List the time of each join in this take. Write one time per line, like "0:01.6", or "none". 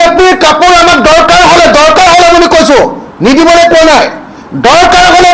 none